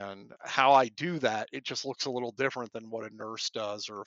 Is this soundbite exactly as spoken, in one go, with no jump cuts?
yes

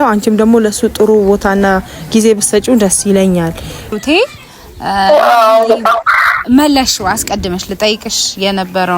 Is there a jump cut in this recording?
yes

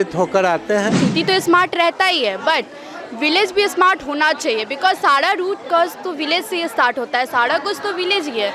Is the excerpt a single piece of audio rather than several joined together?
no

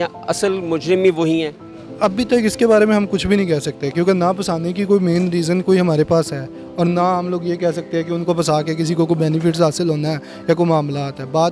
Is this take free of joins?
yes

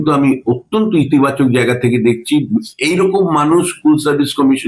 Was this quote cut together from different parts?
yes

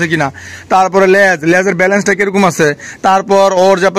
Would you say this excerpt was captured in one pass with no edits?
yes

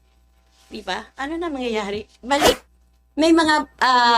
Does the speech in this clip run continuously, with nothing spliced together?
no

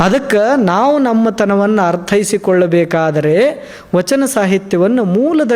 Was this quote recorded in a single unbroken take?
yes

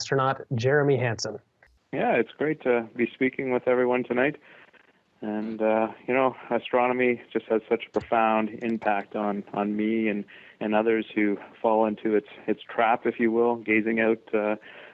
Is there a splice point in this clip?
yes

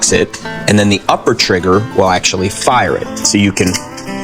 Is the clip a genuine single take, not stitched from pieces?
yes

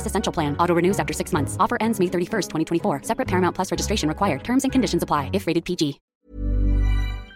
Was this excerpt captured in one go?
no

